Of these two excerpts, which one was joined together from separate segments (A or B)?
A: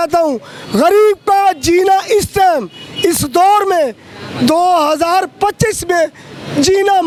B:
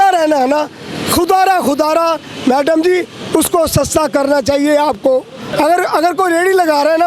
B